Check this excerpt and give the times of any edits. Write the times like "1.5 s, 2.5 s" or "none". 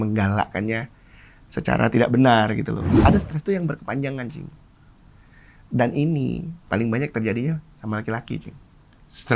2.9 s